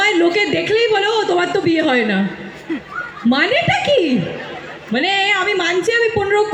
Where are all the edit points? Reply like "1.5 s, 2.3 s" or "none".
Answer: none